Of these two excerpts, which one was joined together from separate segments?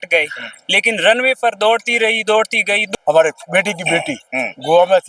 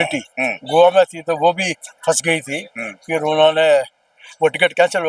first; 1 cut; at 2.8 s

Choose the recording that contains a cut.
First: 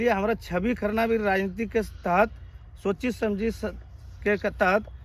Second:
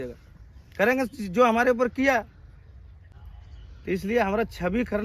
second; 1 cut; at 3.1 s

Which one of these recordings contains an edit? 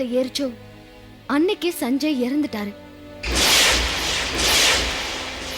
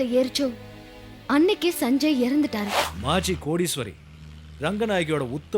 second; 1 cut; at 2.9 s

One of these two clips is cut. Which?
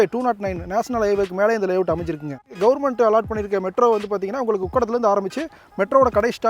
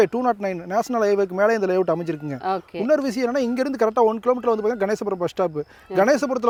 first; 1 cut; at 2.4 s

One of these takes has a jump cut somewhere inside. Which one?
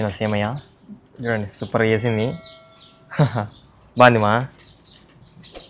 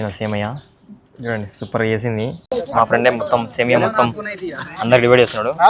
second; 1 cut; at 2.4 s

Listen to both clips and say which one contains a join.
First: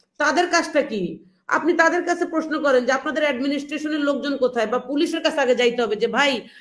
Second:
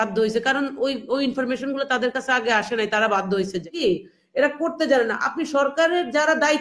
second; 1 cut; at 3.7 s

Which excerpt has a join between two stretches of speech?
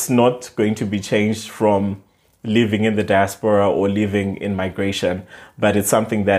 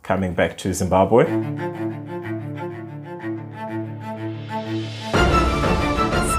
second; 1 cut; at 1.3 s

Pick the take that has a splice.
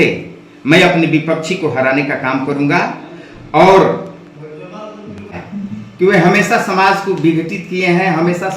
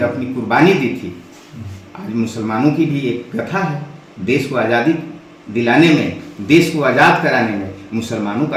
first; 1 cut; at 5.4 s

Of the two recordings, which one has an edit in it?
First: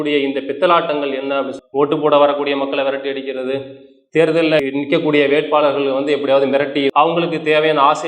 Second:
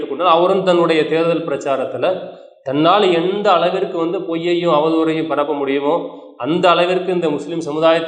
first; 2 cuts; at 1.5 s, 6.9 s

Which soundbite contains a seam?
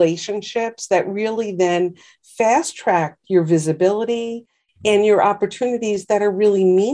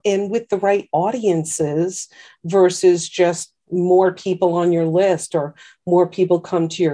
second; 1 cut; at 3.6 s

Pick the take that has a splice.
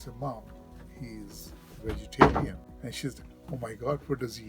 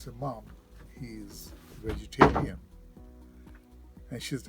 first; 1 cut; at 2.7 s

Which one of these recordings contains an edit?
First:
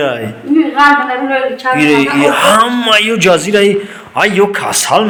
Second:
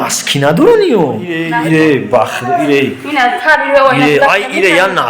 second; 1 cut; at 1.5 s

